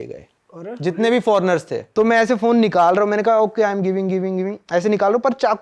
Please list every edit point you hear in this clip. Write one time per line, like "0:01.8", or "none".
0:01.8